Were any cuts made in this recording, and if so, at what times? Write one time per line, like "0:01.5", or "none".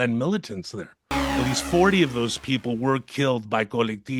0:01.2